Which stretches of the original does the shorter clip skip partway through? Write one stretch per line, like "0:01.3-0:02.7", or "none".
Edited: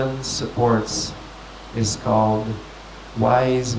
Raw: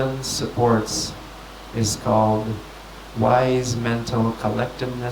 none